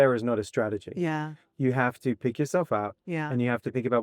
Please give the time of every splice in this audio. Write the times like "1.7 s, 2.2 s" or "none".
none